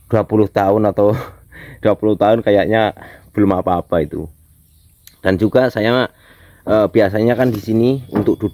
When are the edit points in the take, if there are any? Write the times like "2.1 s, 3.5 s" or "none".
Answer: none